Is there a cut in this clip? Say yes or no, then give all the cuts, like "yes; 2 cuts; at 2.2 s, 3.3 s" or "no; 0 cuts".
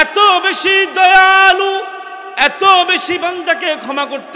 no; 0 cuts